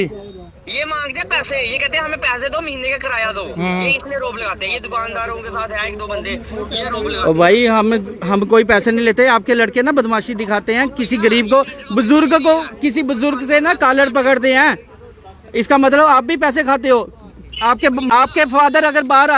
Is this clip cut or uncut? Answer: cut